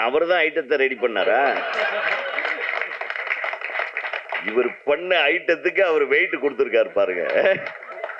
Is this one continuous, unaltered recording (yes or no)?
yes